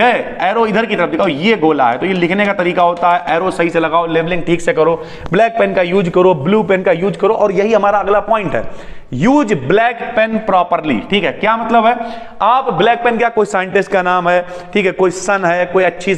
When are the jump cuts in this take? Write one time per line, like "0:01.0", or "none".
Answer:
none